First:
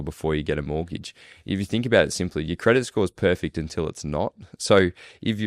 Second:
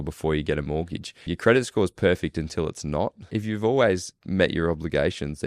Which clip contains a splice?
second; 3 cuts; at 1.3 s, 3.3 s, 4.1 s

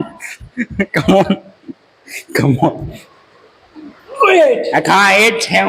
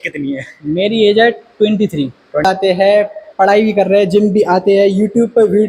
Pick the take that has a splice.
second; 1 cut; at 2.4 s

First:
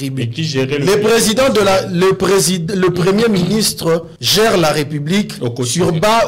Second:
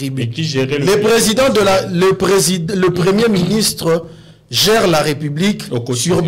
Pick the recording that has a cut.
first; 1 cut; at 4.2 s

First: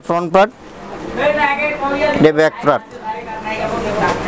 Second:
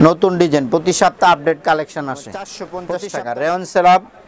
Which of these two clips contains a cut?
second; 1 cut; at 2.9 s

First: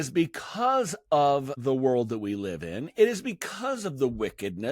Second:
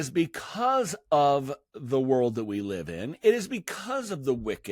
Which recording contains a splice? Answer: first; 1 cut; at 1.5 s

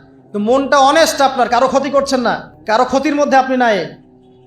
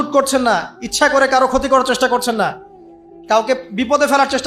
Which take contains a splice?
first; 1 cut; at 2.5 s

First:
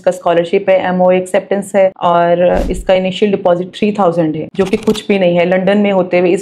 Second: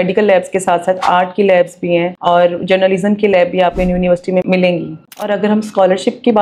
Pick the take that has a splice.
second; 1 cut; at 5.0 s

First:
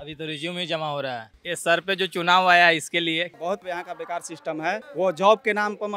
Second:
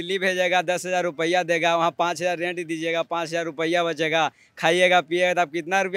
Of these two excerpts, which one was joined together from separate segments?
first; 3 cuts; at 1.3 s, 3.3 s, 4.9 s

